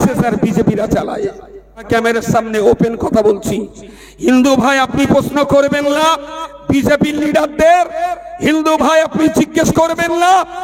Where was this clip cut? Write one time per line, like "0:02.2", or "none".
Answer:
0:01.9